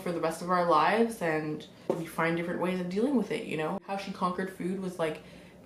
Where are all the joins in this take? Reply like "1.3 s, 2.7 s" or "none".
1.7 s, 3.9 s

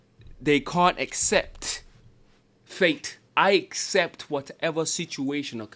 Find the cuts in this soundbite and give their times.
3.1 s

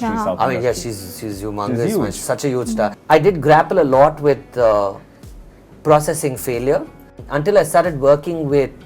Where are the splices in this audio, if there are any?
3.0 s, 7.2 s

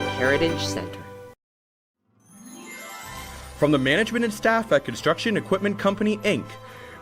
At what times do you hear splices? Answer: 1.9 s

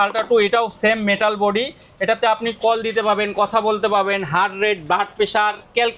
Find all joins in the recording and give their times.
none

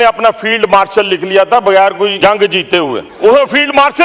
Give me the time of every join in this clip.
2.1 s, 3.1 s

